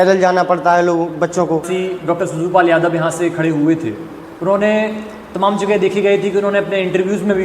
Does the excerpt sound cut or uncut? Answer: cut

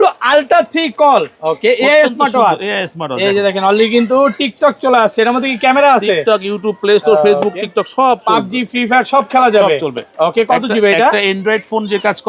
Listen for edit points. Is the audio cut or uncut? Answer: uncut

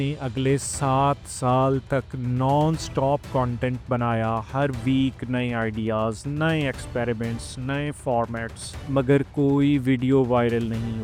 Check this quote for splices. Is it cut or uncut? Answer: uncut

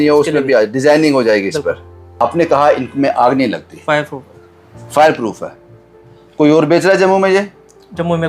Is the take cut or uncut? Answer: cut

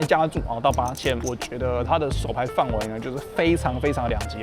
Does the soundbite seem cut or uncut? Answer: cut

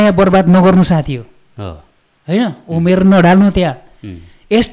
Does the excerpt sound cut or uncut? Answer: uncut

